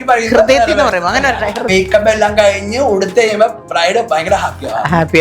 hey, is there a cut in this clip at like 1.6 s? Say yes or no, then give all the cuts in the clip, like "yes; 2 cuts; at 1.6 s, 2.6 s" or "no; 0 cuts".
yes; 1 cut; at 1.6 s